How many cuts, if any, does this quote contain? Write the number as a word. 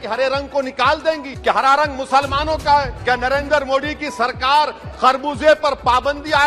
two